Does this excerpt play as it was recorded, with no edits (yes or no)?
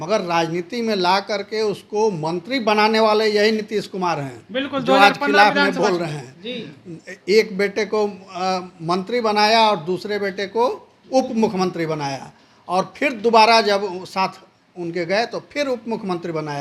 yes